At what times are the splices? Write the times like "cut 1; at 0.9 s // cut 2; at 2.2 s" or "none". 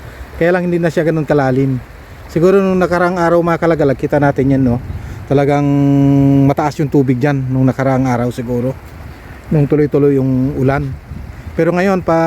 none